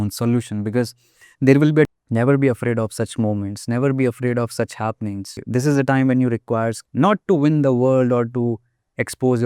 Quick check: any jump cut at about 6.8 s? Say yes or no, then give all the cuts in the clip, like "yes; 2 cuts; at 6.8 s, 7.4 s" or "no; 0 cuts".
yes; 3 cuts; at 1.9 s, 5.4 s, 6.8 s